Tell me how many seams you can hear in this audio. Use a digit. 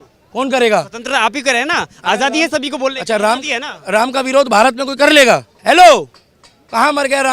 1